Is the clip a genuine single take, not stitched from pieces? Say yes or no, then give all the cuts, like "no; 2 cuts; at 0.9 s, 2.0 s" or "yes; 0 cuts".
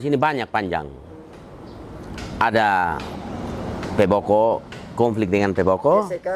yes; 0 cuts